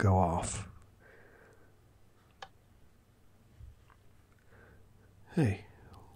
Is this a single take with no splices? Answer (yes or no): no